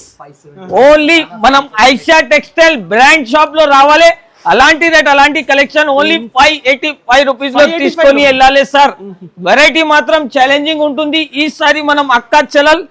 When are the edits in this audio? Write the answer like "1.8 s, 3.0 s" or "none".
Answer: none